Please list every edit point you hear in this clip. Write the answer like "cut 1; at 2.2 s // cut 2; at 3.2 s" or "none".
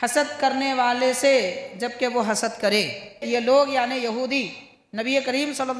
cut 1; at 3.2 s